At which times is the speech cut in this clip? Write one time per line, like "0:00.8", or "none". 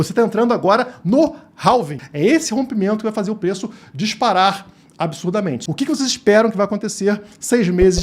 0:02.0
0:05.6